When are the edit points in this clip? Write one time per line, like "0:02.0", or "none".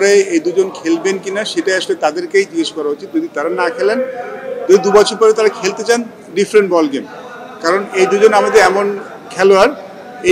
none

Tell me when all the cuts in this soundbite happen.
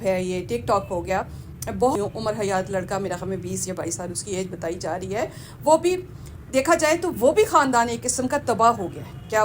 0:01.9

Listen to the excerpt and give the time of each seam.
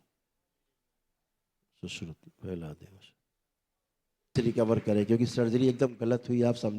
0:04.3

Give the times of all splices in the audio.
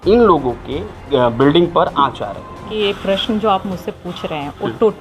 0:01.1
0:02.6

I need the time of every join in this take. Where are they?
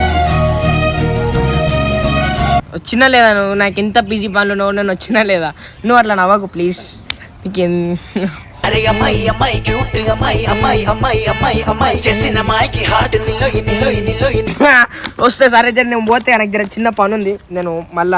0:02.7

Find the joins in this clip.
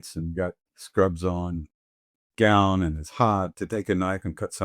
0:03.5

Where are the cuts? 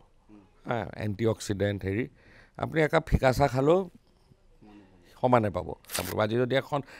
0:06.0

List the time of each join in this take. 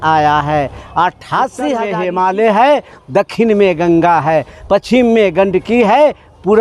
0:01.8

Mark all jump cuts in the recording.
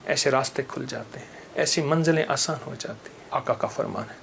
0:03.1

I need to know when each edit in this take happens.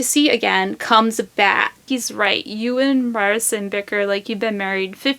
0:01.8

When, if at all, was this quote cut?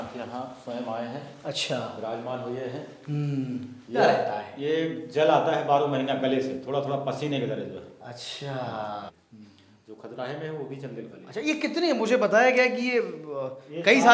0:04.0
0:09.2

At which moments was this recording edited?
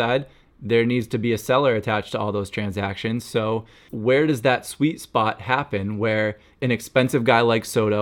0:03.8
0:06.6

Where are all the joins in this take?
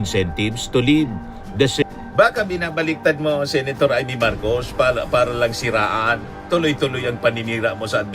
0:01.8

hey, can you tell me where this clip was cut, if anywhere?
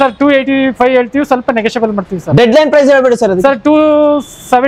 none

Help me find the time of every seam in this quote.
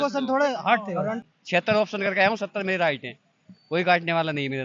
0:01.3

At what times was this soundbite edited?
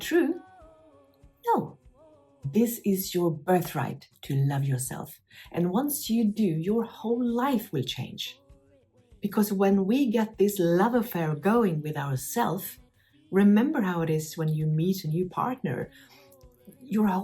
0:02.4

